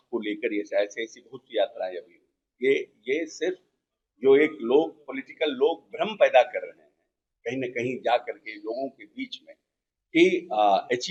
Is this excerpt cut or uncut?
uncut